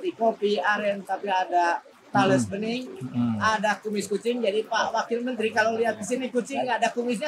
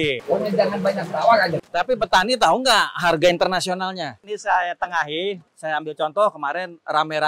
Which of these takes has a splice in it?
second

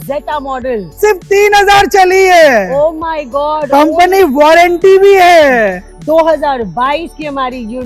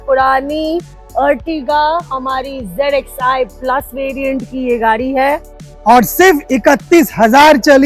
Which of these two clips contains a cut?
first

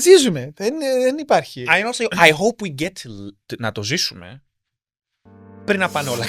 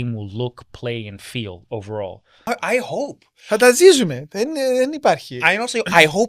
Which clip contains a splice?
second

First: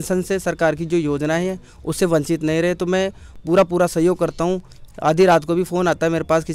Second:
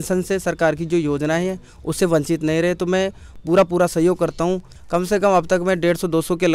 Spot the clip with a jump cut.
second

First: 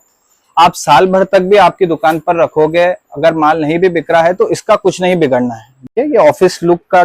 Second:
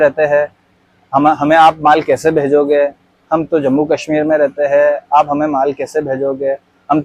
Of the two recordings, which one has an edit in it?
first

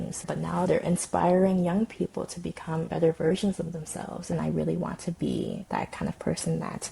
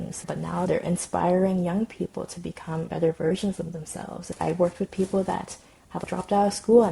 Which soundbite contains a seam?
first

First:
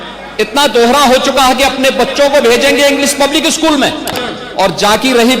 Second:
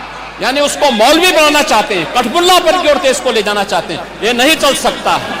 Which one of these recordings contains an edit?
first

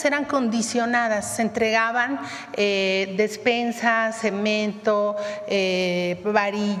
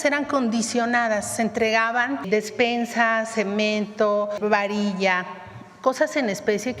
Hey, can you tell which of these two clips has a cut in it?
second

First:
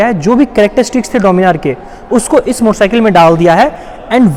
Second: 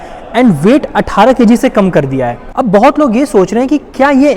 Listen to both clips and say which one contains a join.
second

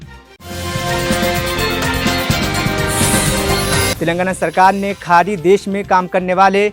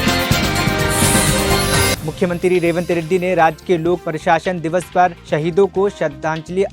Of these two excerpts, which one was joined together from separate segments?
second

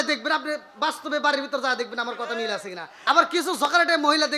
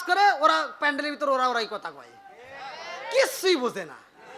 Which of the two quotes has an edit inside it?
first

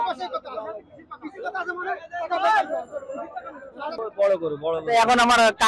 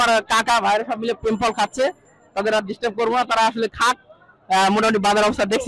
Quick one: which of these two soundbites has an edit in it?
first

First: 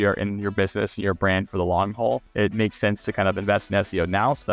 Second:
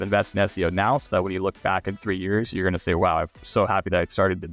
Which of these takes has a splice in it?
first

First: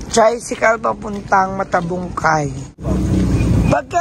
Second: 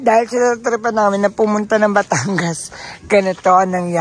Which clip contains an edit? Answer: first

